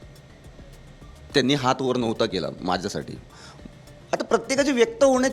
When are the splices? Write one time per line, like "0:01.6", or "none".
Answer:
0:03.3